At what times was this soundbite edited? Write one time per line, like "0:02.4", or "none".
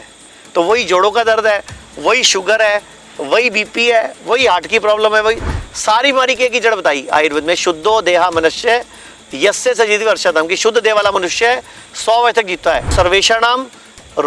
0:12.9